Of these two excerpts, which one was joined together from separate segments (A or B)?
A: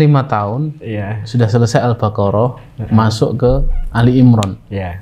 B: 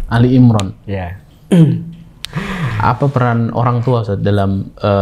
B